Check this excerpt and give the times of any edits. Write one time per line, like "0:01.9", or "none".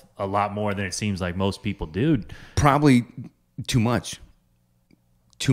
none